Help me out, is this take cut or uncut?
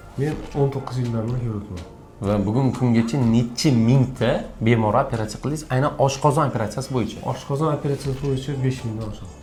uncut